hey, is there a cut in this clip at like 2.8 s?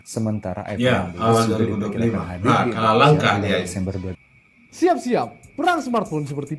no; 1 cut; at 4.1 s

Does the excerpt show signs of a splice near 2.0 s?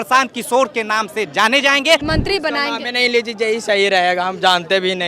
yes; 1 cut; at 2.0 s

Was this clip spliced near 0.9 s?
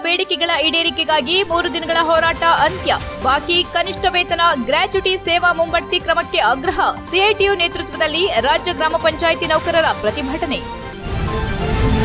no; 1 cut; at 10.9 s

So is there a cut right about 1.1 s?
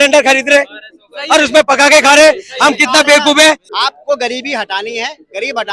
no; 1 cut; at 3.7 s

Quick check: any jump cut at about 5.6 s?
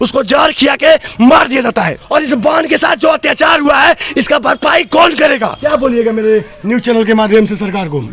yes; 2 cuts; at 2.0 s, 5.6 s

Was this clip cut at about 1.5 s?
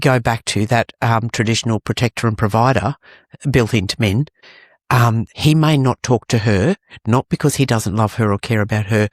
no; 1 cut; at 5.0 s

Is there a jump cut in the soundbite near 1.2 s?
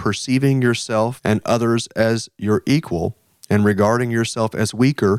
yes; 1 cut; at 1.2 s

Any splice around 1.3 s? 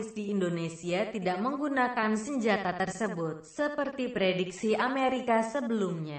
no; 1 cut; at 4.0 s

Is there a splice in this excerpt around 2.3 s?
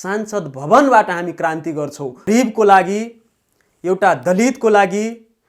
yes; 1 cut; at 2.3 s

